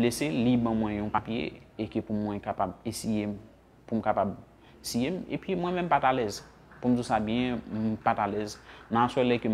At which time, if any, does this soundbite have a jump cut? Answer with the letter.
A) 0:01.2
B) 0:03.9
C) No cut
A